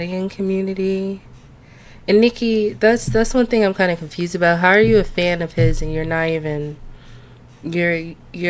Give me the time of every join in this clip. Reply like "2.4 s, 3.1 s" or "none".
none